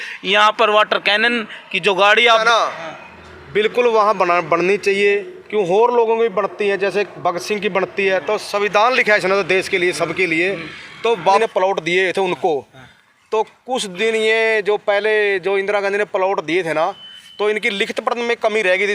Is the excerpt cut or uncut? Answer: cut